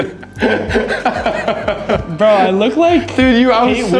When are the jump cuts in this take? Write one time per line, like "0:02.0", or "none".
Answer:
0:02.0

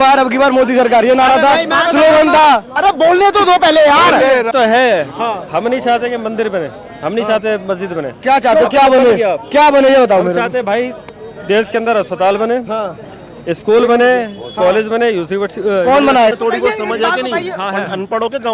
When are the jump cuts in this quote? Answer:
0:04.5
0:16.3

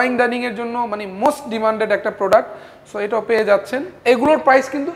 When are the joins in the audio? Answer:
0:03.9

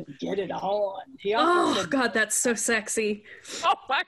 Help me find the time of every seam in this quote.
none

